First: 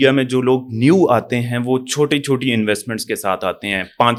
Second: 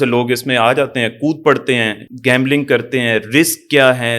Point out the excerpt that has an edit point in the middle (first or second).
second